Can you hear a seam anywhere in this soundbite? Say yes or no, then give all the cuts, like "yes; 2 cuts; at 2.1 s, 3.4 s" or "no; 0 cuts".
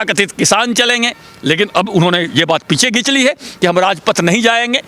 no; 0 cuts